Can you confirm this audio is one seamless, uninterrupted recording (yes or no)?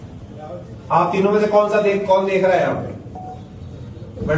yes